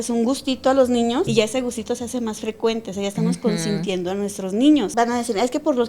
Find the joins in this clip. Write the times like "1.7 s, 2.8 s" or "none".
1.3 s, 4.9 s